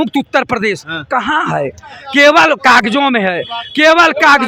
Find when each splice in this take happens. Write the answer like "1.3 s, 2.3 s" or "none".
none